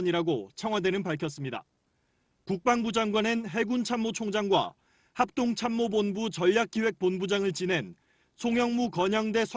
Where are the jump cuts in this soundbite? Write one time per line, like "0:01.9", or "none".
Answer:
0:06.9